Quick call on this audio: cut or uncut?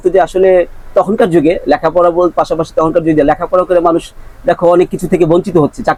uncut